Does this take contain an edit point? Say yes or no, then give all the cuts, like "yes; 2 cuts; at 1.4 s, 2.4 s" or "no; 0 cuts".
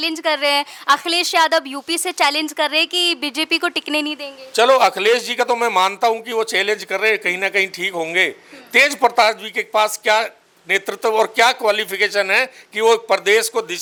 no; 0 cuts